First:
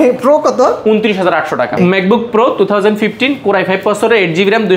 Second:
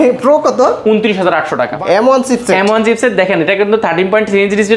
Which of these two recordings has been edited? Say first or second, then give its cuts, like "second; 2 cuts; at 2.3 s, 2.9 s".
second; 1 cut; at 1.7 s